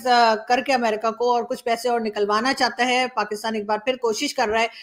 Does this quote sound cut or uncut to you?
uncut